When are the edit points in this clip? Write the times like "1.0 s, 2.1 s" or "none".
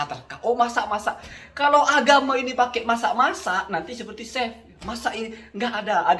none